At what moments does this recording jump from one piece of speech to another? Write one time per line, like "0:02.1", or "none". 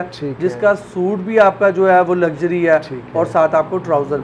none